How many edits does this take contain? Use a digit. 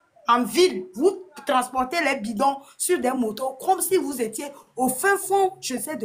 0